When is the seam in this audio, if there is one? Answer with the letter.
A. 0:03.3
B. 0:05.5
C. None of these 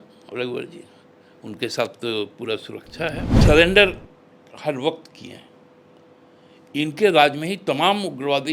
A